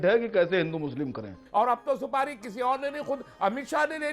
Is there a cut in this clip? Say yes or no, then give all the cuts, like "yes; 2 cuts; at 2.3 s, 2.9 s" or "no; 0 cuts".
yes; 1 cut; at 1.3 s